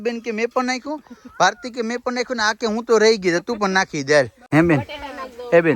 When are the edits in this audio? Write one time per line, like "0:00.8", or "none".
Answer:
0:04.4